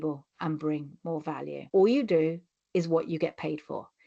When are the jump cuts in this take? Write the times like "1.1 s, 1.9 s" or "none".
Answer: 1.6 s